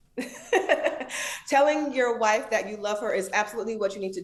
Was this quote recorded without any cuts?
yes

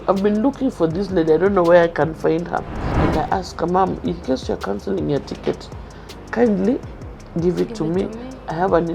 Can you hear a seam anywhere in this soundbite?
yes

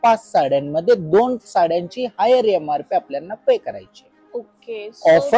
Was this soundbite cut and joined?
no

